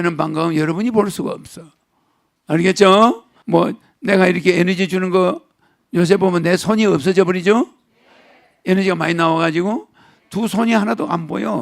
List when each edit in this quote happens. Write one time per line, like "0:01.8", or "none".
0:03.3

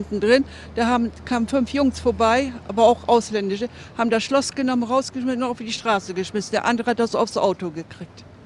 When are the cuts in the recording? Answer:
0:03.8

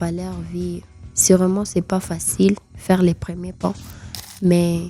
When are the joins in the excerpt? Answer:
none

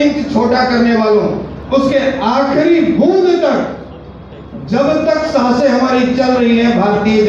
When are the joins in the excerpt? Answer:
0:01.5

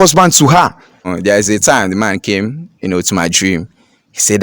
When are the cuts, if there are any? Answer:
0:01.1

